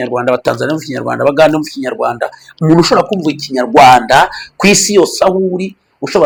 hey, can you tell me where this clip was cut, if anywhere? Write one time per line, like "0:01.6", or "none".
none